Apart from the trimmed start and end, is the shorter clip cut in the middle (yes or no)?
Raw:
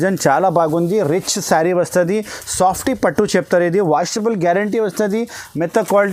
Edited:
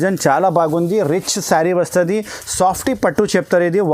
no